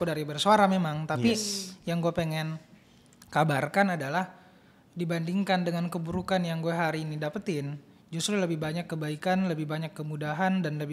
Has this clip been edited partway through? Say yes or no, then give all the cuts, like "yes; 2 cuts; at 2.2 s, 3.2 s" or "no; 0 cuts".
no; 0 cuts